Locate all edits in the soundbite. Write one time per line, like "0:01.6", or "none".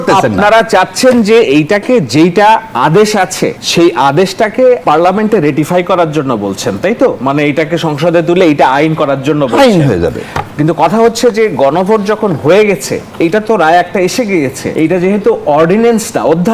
0:03.6
0:04.8
0:14.6